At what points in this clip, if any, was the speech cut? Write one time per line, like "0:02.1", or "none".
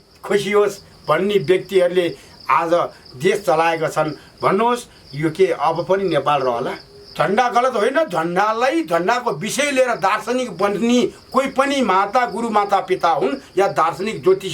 0:06.8